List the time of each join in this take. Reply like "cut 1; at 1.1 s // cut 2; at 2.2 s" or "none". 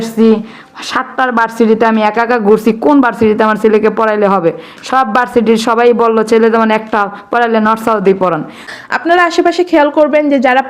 cut 1; at 8.7 s